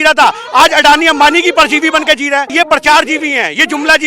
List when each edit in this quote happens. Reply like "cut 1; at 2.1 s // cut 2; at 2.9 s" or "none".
cut 1; at 2.5 s